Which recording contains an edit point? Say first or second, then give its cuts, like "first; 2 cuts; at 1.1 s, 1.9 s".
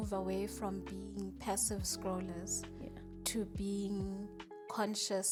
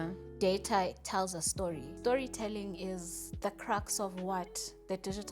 second; 1 cut; at 1.9 s